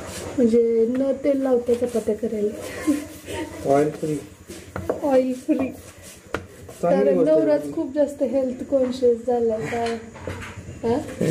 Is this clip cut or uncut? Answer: uncut